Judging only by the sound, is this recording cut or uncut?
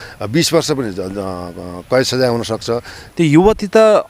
cut